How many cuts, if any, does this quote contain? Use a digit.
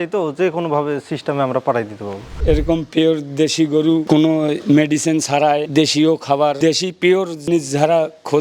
2